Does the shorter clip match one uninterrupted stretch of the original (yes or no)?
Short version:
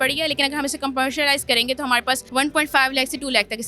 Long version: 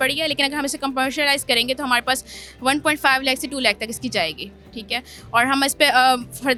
no